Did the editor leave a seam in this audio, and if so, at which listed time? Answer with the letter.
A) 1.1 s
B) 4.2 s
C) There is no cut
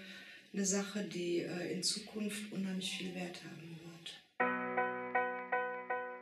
B